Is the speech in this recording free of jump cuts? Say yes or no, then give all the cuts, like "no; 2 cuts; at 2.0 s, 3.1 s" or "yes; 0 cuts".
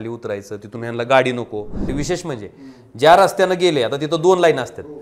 no; 1 cut; at 1.9 s